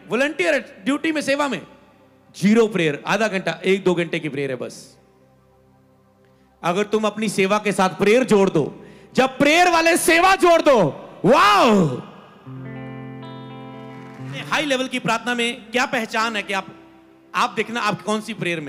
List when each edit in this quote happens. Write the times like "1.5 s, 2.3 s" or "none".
14.4 s